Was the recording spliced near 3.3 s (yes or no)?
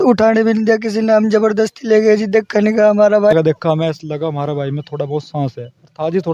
yes